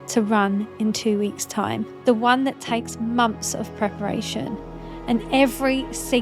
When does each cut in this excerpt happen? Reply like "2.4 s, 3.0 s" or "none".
1.9 s